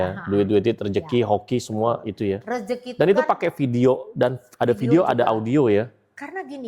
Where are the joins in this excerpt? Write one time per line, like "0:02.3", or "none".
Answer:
none